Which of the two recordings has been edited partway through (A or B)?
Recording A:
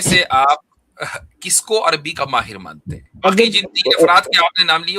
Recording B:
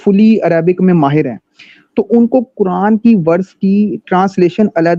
A